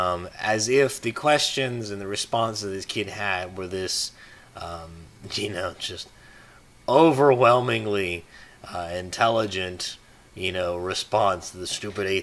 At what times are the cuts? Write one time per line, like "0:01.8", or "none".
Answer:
0:09.1